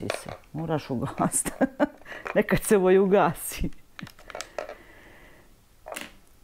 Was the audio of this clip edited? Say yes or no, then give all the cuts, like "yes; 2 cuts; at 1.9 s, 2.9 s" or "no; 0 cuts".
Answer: no; 0 cuts